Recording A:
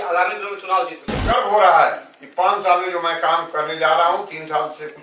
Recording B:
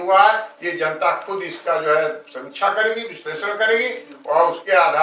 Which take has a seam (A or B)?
A